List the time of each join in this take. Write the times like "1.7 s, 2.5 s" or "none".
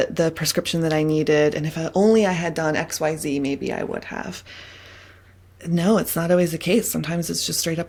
none